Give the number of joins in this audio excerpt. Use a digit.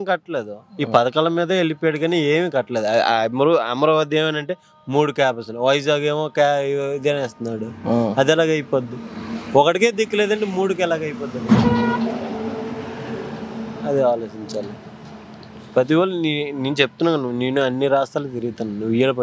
0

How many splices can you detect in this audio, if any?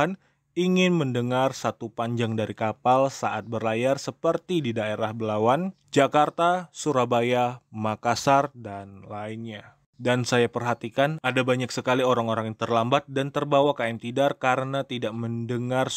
1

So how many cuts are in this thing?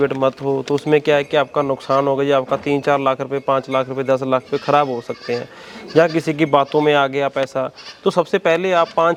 0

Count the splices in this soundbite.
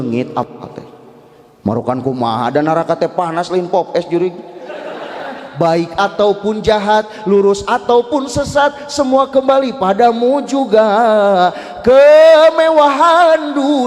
1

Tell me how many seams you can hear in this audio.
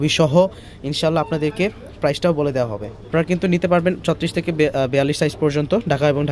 1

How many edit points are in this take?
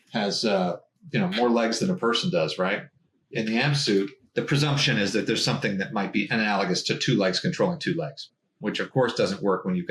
3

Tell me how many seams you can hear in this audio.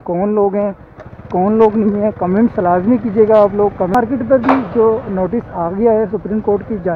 1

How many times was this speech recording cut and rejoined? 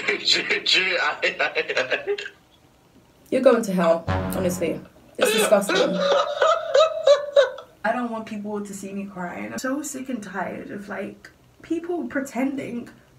2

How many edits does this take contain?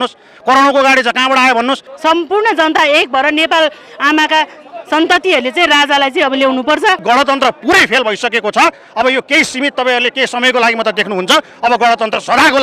2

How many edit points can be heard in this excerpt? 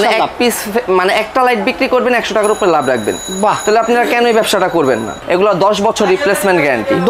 1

